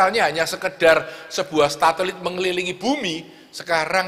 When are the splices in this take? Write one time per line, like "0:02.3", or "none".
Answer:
none